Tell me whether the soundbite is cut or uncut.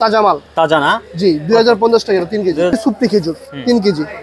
cut